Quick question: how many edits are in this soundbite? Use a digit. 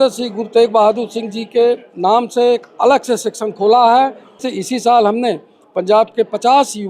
1